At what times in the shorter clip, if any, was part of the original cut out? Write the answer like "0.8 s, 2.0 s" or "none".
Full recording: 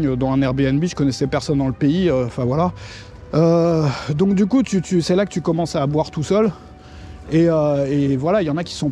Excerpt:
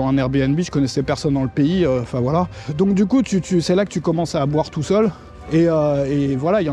2.6 s, 5.3 s